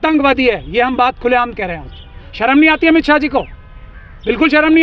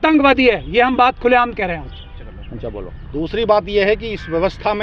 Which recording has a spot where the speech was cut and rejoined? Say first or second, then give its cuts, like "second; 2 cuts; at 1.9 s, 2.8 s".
first; 1 cut; at 2.3 s